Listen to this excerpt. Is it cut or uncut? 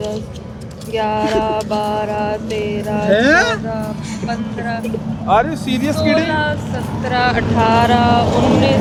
uncut